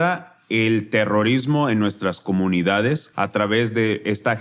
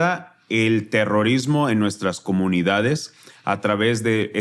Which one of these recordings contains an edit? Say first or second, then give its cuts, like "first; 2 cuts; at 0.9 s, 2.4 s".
first; 1 cut; at 3.1 s